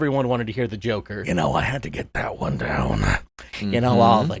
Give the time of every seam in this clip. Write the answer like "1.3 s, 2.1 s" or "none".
1.1 s